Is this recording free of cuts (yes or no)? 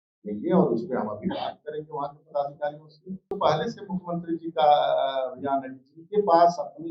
no